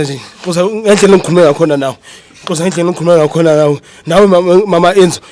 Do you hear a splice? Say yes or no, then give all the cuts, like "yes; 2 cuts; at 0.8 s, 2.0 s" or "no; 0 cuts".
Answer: no; 0 cuts